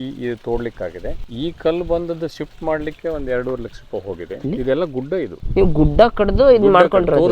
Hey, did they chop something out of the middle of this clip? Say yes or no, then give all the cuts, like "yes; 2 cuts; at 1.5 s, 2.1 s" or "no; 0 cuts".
yes; 3 cuts; at 1.1 s, 4.5 s, 5.4 s